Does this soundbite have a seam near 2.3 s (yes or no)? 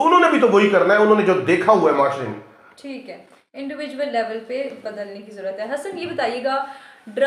no